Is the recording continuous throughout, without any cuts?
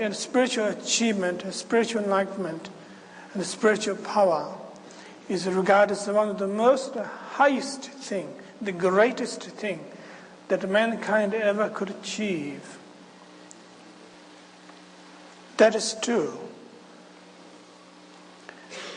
no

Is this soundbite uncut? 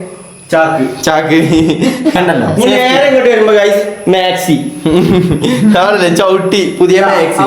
no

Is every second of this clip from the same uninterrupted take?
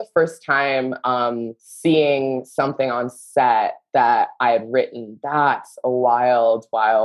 no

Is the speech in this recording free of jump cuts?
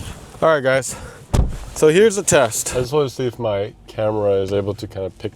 no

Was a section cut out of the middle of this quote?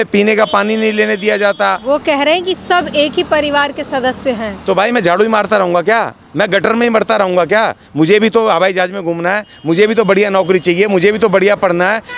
yes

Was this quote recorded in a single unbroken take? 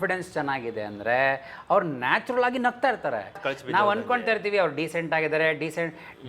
no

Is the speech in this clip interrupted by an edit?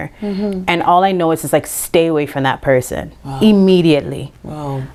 no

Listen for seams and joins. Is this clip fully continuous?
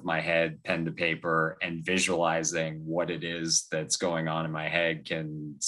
yes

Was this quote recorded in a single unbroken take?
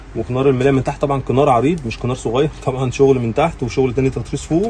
yes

